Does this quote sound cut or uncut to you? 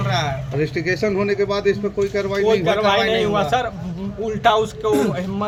uncut